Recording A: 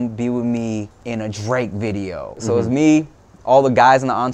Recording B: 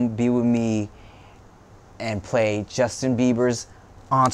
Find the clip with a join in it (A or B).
A